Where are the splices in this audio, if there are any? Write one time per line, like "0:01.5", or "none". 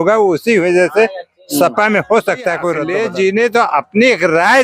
0:02.8